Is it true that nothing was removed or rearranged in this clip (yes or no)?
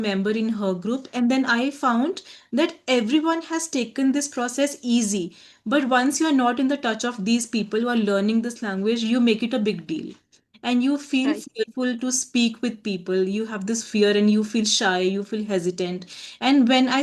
yes